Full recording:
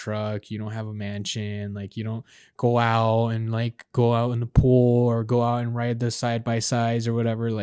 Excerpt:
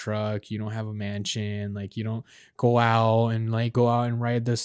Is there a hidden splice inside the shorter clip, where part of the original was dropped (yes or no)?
yes